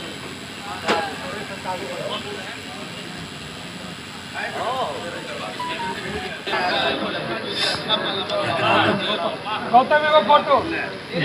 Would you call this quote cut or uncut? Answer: cut